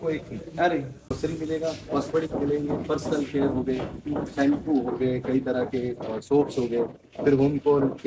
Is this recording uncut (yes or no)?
no